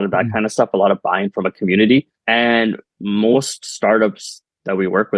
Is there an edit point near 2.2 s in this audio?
yes; 1 cut; at 2.2 s

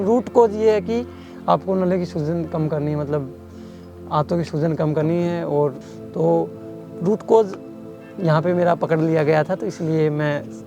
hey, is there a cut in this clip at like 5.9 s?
yes; 1 cut; at 5.9 s

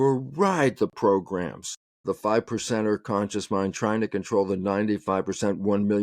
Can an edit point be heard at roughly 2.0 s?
yes; 1 cut; at 2.0 s

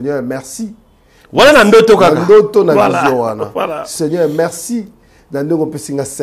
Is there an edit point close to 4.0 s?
no; 0 cuts

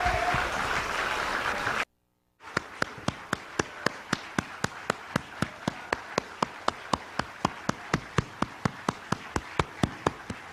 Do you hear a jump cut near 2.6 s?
no; 0 cuts

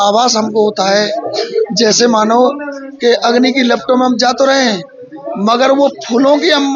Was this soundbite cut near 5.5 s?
no; 0 cuts

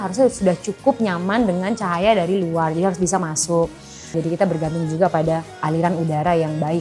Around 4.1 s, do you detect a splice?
yes; 2 cuts; at 4.1 s, 5.6 s

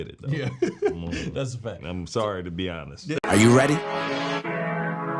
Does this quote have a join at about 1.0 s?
no; 1 cut; at 3.2 s

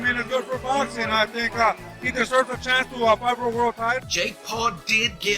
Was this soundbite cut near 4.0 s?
yes; 1 cut; at 4.0 s

